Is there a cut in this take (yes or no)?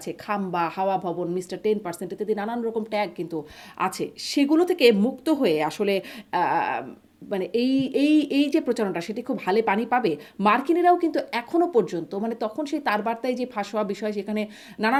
no